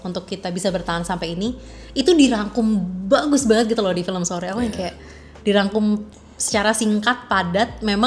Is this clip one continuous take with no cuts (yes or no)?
yes